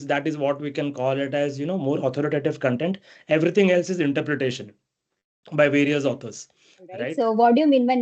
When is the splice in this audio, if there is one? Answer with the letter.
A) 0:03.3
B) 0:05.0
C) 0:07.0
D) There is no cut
C